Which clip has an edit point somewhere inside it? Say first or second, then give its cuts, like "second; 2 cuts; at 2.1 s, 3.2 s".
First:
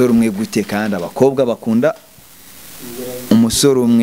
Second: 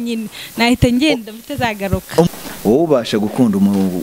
second; 1 cut; at 2.3 s